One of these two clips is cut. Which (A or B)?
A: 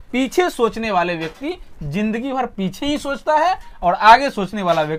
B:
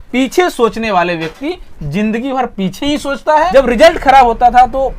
B